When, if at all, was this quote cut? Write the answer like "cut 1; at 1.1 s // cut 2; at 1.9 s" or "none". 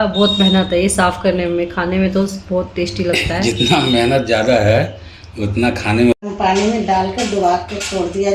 cut 1; at 6.1 s